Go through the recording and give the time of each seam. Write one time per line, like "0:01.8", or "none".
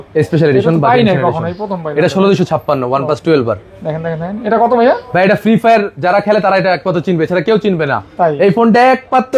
none